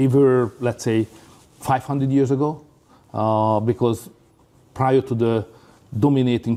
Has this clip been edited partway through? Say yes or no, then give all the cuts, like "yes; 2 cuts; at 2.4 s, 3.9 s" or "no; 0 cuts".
no; 0 cuts